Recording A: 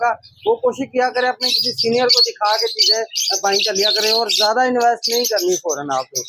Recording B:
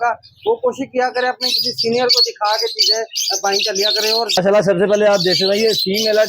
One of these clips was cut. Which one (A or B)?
B